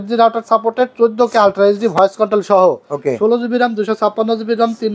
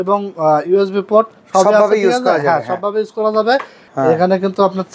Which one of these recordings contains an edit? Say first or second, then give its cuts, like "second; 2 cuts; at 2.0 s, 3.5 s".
second; 1 cut; at 3.8 s